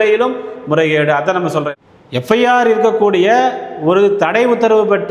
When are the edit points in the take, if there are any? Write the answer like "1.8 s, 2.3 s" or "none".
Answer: 1.7 s